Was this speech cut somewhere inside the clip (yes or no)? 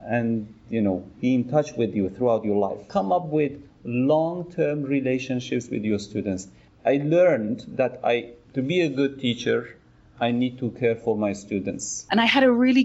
yes